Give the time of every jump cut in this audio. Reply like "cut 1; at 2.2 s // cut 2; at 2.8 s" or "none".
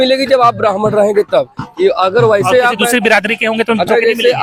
none

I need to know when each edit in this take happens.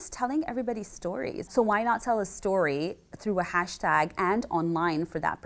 cut 1; at 1.5 s

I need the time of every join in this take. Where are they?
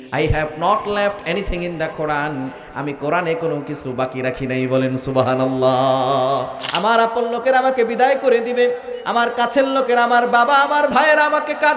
cut 1; at 6.6 s

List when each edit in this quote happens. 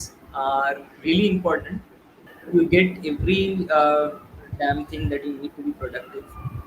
cut 1; at 2.3 s

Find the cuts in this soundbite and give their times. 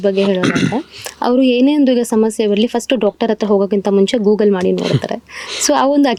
none

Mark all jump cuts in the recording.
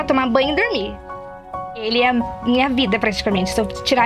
cut 1; at 1.4 s

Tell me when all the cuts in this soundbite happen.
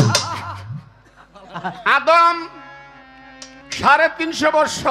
cut 1; at 1.8 s

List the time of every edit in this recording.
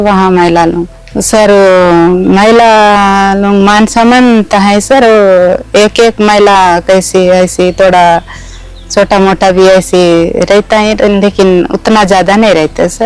none

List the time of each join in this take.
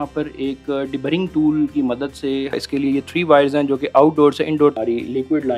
cut 1; at 2.6 s // cut 2; at 4.8 s

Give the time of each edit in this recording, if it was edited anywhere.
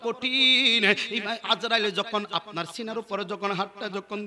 none

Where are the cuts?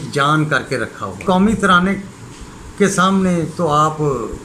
cut 1; at 1.2 s

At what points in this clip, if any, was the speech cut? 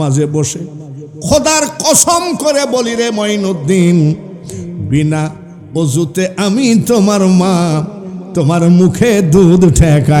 none

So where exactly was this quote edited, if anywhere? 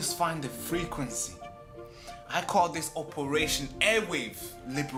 none

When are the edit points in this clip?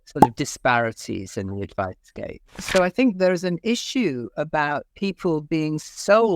cut 1; at 2.6 s // cut 2; at 4.9 s

